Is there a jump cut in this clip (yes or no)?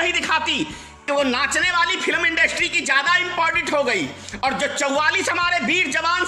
yes